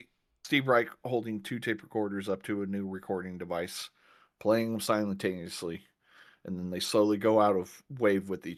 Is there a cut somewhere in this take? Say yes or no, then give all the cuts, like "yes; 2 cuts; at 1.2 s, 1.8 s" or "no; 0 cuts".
no; 0 cuts